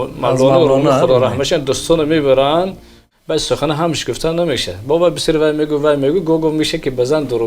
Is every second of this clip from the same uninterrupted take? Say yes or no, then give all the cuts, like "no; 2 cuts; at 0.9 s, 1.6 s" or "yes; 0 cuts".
no; 1 cut; at 3.0 s